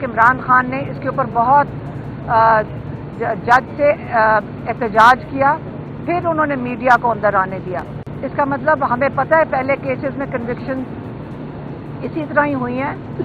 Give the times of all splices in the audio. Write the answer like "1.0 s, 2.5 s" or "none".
none